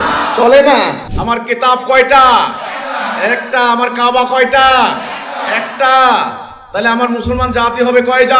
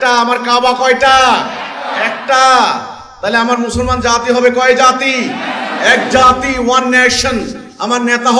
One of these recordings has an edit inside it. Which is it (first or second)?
first